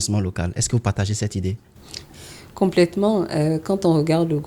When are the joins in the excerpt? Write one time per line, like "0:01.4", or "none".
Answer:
none